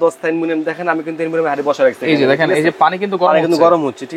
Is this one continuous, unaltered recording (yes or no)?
yes